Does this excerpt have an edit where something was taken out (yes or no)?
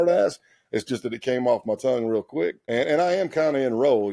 no